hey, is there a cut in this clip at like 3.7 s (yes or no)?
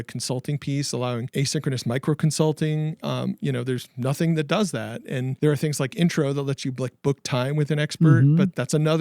no